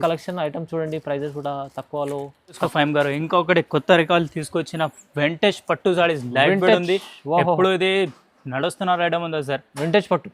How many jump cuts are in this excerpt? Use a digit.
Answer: 1